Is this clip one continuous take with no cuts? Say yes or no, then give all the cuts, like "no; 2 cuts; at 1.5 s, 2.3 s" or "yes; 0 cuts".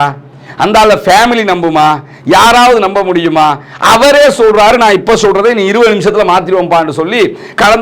yes; 0 cuts